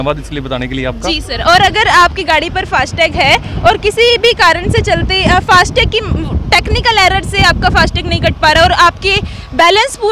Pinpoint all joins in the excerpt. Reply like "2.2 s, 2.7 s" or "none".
none